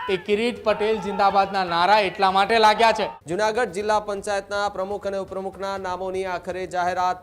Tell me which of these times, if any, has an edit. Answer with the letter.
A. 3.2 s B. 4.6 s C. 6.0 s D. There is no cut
A